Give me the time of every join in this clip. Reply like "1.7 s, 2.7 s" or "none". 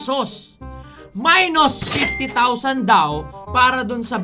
none